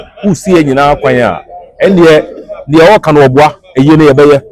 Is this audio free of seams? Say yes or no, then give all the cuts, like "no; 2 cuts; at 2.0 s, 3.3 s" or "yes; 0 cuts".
yes; 0 cuts